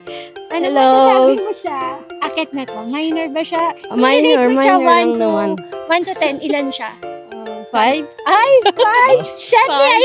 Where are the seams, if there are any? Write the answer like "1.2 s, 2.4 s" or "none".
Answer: 2.1 s